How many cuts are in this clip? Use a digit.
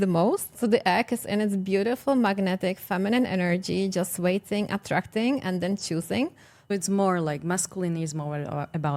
1